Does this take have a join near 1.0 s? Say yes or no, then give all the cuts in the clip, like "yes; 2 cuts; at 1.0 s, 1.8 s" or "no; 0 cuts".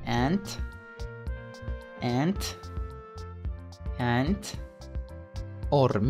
no; 2 cuts; at 2.4 s, 3.8 s